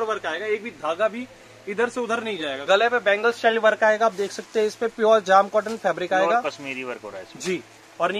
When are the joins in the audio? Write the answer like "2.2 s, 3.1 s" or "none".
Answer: 2.6 s

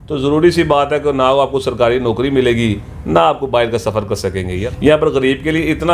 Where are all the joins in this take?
4.6 s

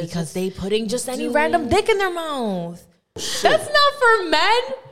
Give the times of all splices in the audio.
3.3 s

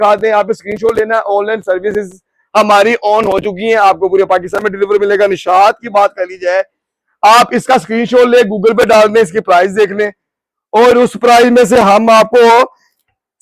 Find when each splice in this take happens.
none

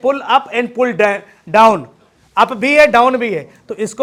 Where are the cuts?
none

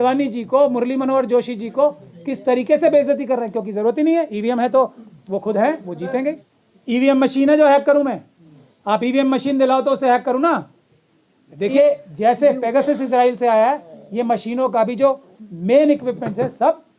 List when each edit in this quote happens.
6.5 s, 11.7 s

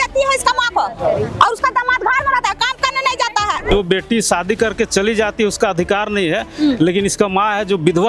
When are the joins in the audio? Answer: 3.7 s

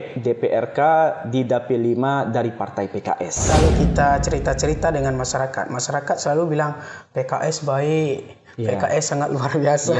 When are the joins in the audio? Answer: 3.4 s

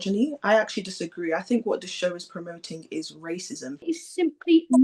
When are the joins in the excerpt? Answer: 3.8 s

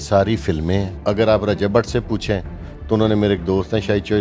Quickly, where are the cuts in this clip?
0.9 s

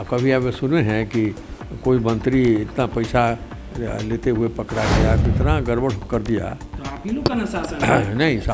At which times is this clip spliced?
5.2 s

